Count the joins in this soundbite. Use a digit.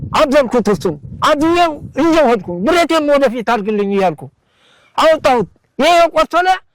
0